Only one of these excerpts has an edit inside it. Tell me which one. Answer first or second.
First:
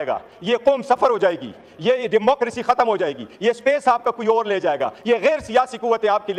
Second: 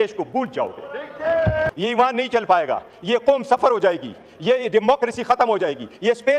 second